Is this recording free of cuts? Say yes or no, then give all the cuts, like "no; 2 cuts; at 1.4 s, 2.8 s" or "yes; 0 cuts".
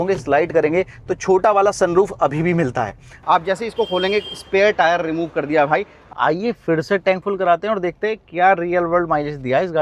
no; 2 cuts; at 3.2 s, 5.9 s